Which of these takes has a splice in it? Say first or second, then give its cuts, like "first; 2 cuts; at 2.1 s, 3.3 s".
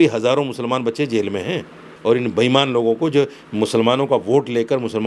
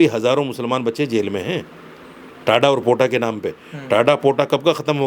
first; 1 cut; at 1.9 s